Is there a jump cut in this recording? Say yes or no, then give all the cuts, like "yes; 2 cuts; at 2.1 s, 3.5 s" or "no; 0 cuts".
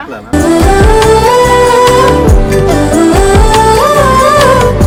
no; 0 cuts